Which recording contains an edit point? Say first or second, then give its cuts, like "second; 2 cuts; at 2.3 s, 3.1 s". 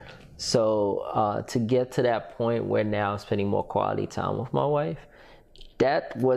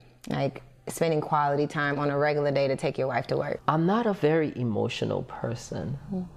second; 1 cut; at 3.6 s